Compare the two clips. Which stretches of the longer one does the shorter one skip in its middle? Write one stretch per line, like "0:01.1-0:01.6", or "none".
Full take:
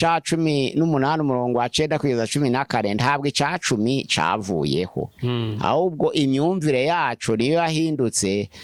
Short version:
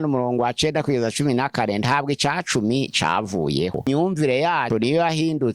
0:05.0-0:06.3
0:07.1-0:07.2